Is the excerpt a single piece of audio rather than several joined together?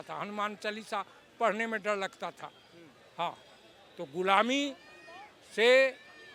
yes; 0 cuts

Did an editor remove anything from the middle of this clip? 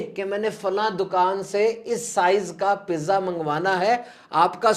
no; 0 cuts

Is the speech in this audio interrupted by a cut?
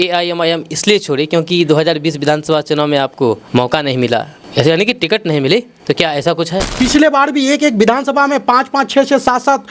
yes; 4 cuts; at 3.4 s, 4.4 s, 5.7 s, 6.7 s

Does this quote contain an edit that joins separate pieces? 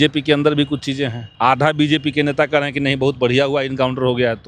yes; 1 cut; at 1.2 s

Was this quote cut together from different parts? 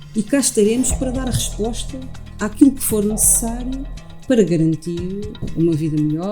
yes; 1 cut; at 5.4 s

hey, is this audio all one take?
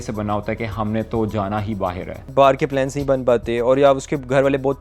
no; 1 cut; at 2.3 s

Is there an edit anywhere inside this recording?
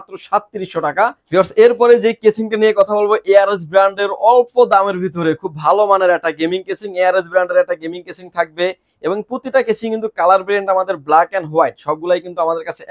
no; 0 cuts

